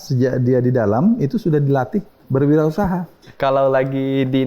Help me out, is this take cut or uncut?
cut